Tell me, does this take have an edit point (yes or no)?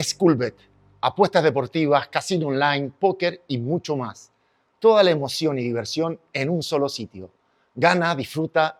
no